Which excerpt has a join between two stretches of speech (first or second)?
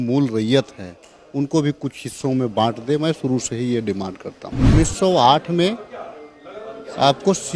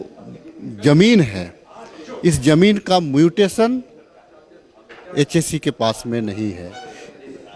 first